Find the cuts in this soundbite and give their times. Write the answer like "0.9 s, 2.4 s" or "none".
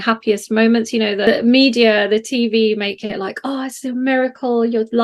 1.3 s